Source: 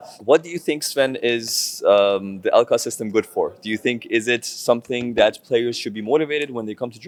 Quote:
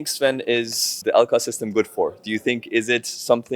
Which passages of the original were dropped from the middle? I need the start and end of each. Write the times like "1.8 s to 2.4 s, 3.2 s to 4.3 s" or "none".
1.7 s to 2.3 s

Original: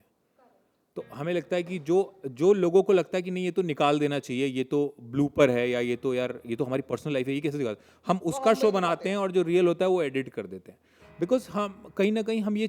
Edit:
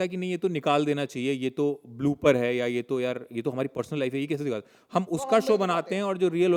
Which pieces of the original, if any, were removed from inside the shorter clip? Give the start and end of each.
none

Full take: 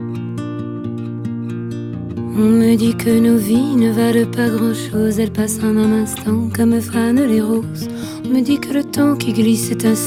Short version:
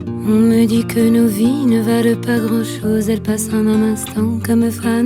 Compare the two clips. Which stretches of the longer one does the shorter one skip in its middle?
none

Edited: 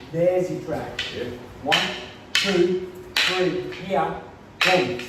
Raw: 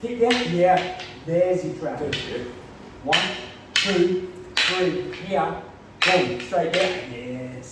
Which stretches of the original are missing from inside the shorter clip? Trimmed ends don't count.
2.6 s to 2.9 s

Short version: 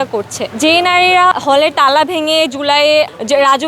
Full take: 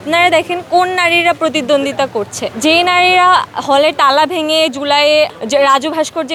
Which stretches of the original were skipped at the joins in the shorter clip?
3.3 s to 3.5 s

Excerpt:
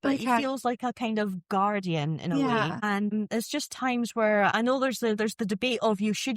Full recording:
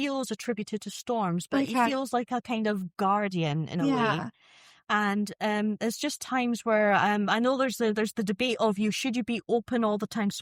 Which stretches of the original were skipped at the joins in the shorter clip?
4.6 s to 5.6 s, 7.0 s to 7.3 s

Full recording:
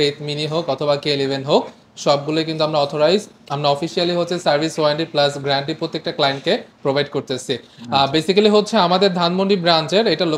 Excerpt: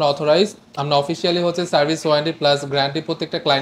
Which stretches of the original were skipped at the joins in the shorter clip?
none

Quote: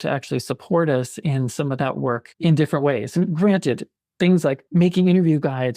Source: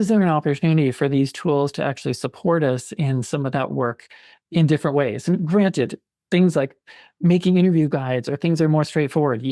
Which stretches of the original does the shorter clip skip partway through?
4.0 s to 4.4 s, 6.7 s to 7.1 s

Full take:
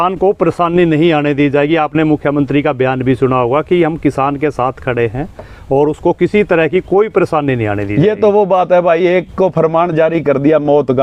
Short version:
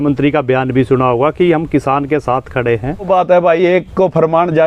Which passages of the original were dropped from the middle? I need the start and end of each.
5.4 s to 8.5 s

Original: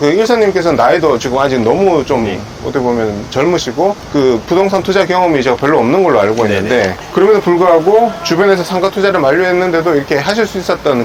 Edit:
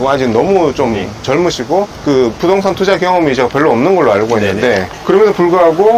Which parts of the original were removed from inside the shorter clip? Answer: 2.5 s to 3.2 s

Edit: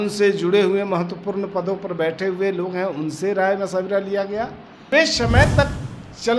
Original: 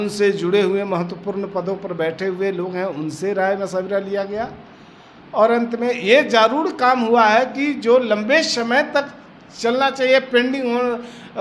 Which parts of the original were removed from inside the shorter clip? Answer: 4.9 s to 8.2 s

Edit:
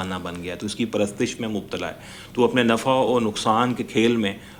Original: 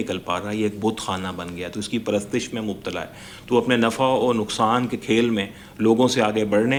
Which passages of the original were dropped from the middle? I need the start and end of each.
none

